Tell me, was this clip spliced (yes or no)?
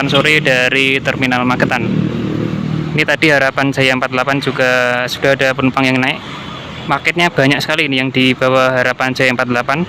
no